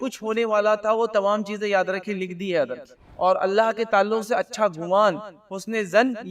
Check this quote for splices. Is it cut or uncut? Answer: cut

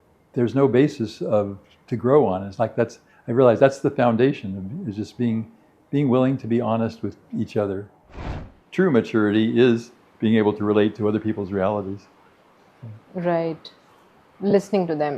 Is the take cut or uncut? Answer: cut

